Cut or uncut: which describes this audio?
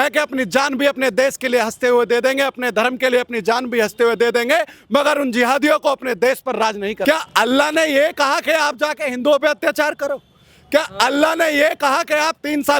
cut